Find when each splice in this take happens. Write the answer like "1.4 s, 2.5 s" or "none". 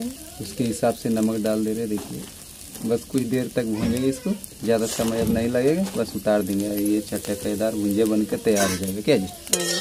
none